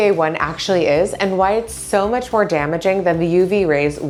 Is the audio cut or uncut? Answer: uncut